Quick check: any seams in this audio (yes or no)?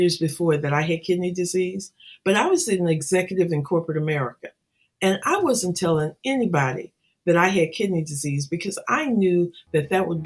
no